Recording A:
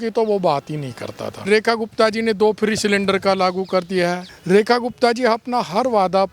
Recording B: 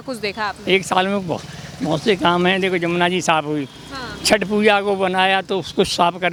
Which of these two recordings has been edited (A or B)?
A